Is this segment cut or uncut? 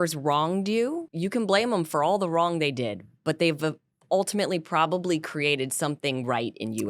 cut